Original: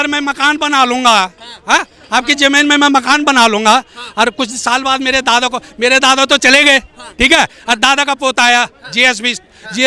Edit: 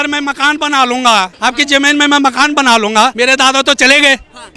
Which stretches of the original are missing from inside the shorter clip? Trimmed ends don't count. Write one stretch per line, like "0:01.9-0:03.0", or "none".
0:01.3-0:02.0
0:03.8-0:05.8

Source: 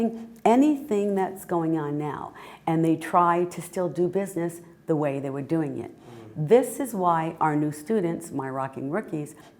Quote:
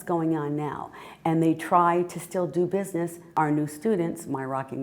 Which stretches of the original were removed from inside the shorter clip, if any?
0:04.7-0:07.3

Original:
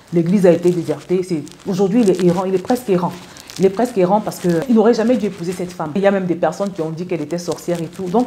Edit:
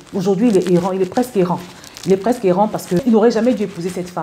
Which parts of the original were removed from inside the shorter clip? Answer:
0:04.5-0:04.6

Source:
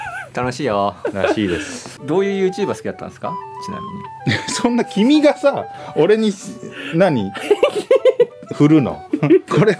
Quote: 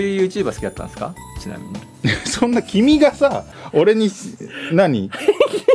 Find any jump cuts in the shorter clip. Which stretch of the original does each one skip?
none

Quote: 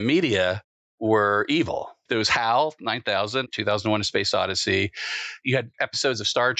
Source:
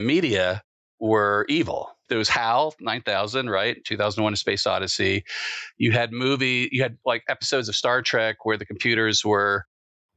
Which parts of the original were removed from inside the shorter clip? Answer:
0:03.5-0:03.8
0:05.8-0:06.9

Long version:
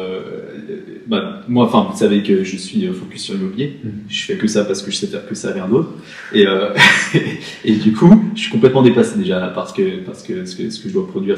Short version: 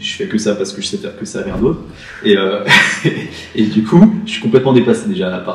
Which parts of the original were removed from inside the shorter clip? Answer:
none

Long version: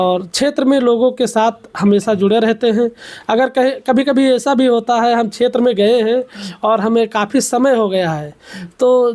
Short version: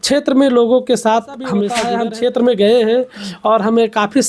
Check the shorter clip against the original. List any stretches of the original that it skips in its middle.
0:02.1-0:05.0

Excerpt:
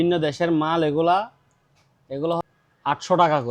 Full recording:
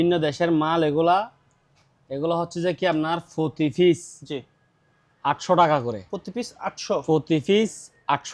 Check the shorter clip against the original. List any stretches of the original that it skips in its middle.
0:02.5-0:04.9

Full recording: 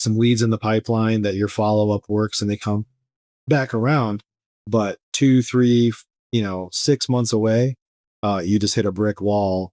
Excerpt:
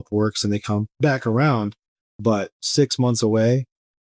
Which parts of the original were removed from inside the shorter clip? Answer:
0:02.9-0:03.4
0:05.0-0:06.7

